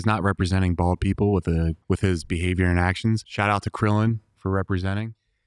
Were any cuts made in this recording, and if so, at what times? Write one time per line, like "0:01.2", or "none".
0:01.8
0:03.3